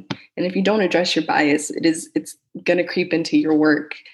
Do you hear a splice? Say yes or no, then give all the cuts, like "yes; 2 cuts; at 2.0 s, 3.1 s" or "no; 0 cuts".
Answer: no; 0 cuts